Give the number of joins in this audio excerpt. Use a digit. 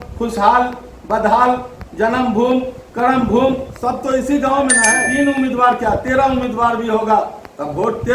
1